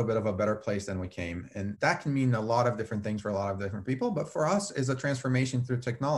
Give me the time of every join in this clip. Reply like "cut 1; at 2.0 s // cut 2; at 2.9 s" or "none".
cut 1; at 1.7 s